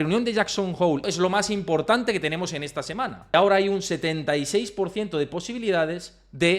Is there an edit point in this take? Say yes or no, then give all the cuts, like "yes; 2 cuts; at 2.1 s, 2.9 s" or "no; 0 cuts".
yes; 2 cuts; at 1.0 s, 3.3 s